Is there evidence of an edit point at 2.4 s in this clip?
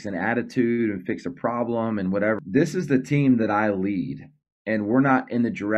yes; 1 cut; at 2.4 s

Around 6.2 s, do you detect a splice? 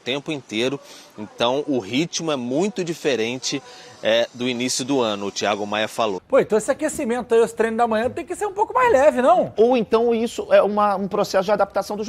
yes; 1 cut; at 6.2 s

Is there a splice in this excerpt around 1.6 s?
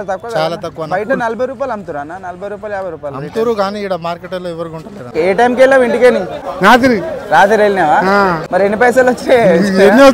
no; 3 cuts; at 5.1 s, 6.5 s, 8.4 s

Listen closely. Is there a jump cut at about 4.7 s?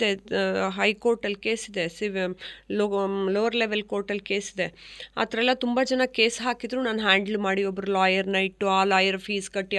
no; 0 cuts

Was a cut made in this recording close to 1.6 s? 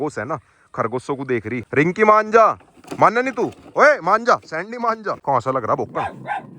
yes; 2 cuts; at 1.6 s, 5.1 s

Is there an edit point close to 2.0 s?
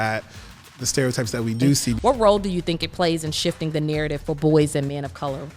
yes; 1 cut; at 2.0 s

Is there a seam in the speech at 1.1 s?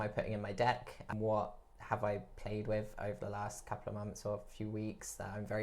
yes; 1 cut; at 1.1 s

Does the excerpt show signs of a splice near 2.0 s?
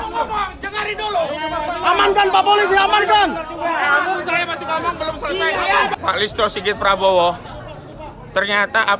no; 1 cut; at 5.9 s

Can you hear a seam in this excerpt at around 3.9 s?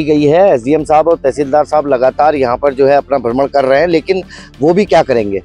no; 0 cuts

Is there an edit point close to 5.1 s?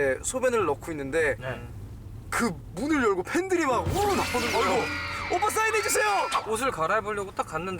no; 1 cut; at 6.4 s

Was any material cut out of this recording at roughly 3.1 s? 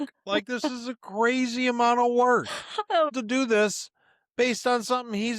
yes; 1 cut; at 3.1 s

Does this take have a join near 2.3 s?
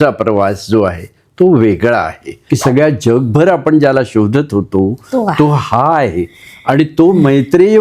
yes; 1 cut; at 2.3 s

